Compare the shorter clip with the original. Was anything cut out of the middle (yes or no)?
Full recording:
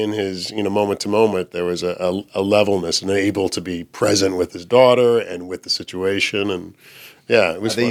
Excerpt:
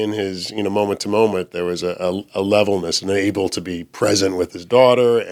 no